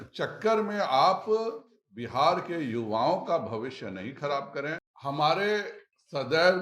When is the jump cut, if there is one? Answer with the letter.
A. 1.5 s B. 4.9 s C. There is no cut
B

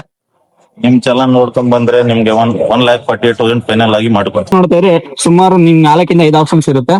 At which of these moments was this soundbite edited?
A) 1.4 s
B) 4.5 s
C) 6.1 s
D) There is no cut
B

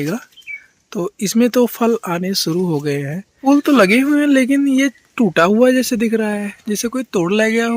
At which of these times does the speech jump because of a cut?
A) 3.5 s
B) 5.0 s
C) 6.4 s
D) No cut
A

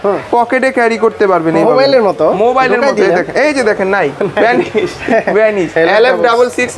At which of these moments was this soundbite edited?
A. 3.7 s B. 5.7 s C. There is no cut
B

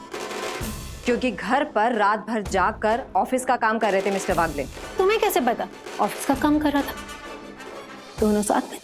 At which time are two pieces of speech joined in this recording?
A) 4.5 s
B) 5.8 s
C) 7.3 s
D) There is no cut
B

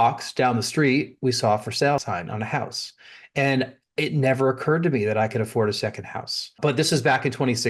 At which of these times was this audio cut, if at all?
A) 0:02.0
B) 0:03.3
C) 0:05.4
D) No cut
A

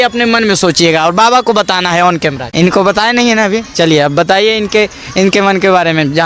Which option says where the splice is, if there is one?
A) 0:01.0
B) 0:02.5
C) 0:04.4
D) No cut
B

